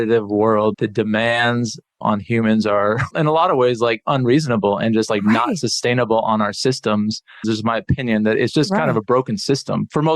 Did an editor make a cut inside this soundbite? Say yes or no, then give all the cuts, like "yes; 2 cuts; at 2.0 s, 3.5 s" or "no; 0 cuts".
yes; 4 cuts; at 0.7 s, 2.0 s, 3.1 s, 7.4 s